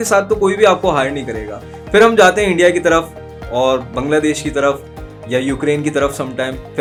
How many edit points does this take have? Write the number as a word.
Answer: zero